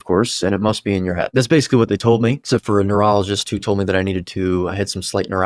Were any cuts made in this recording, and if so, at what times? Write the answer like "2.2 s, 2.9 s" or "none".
1.3 s, 2.4 s